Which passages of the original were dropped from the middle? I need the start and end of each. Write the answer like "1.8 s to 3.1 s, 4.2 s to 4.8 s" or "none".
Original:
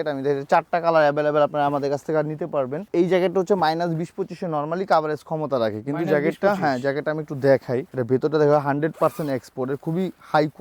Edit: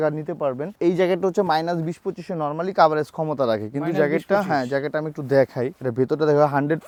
none